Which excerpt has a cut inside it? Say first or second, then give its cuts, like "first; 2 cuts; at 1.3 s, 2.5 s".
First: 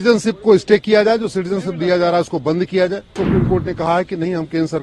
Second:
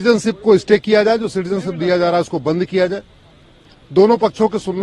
first; 1 cut; at 3.2 s